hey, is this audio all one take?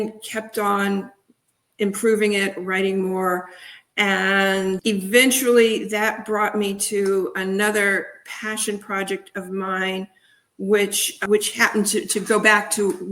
no; 2 cuts; at 4.8 s, 11.2 s

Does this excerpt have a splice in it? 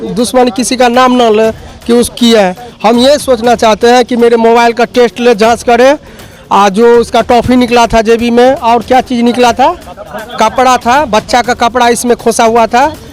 no; 0 cuts

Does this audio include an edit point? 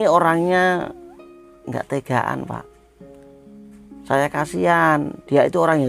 no; 0 cuts

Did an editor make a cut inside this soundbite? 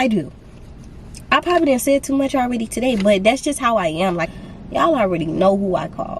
yes; 1 cut; at 4.3 s

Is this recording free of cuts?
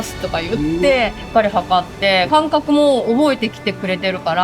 no; 2 cuts; at 1.2 s, 2.3 s

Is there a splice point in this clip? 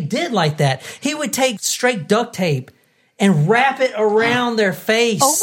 yes; 1 cut; at 1.6 s

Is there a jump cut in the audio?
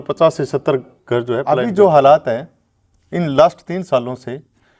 yes; 1 cut; at 1.5 s

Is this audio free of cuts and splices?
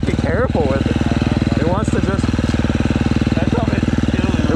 yes; 0 cuts

